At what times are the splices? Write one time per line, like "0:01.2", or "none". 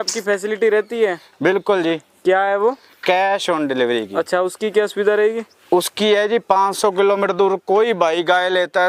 none

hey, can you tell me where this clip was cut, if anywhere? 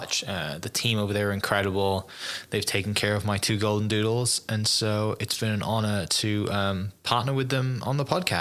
none

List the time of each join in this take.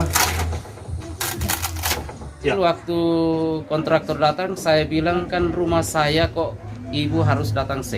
0:02.5
0:05.3

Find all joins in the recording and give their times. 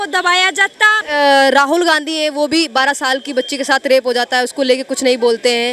0:01.0

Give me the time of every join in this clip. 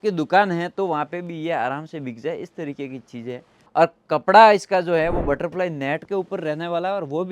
0:03.6

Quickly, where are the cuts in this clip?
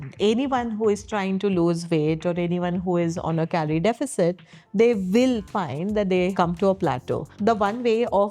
0:06.3
0:07.3

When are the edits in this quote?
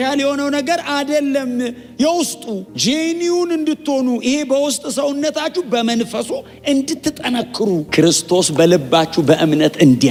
none

